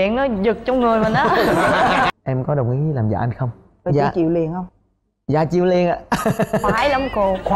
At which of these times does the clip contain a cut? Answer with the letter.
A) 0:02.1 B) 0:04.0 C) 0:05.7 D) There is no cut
A